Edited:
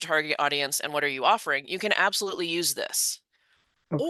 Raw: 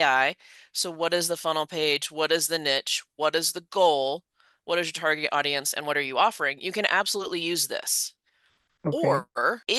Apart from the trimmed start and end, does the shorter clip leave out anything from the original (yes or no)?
no